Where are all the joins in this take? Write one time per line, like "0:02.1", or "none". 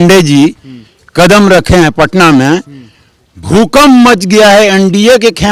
none